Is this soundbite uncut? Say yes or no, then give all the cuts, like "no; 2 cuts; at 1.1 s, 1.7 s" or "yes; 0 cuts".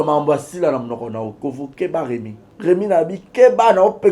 no; 1 cut; at 2.4 s